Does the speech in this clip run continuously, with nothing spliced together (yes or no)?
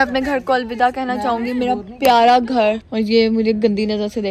no